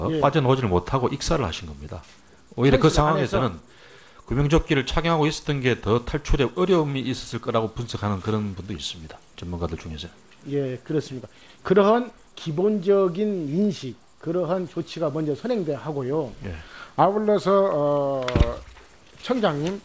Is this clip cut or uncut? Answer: cut